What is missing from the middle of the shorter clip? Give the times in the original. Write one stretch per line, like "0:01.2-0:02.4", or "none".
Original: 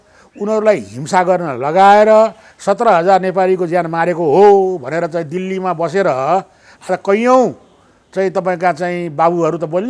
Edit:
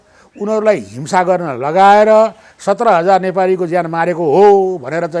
none